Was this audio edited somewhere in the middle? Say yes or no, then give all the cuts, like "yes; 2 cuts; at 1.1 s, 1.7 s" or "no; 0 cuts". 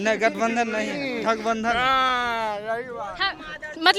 no; 0 cuts